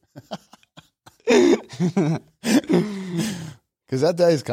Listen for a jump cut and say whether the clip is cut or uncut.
uncut